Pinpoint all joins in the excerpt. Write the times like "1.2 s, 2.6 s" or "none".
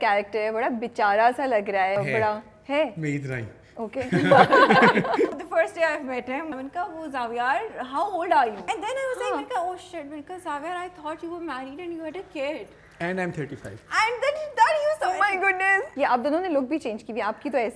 1.9 s, 5.4 s, 6.6 s, 8.7 s, 15.9 s